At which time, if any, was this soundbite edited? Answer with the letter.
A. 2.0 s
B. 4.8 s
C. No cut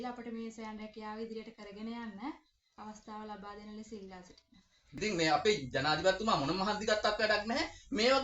B